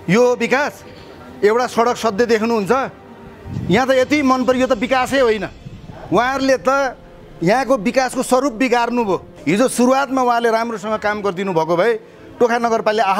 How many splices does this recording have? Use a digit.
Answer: 1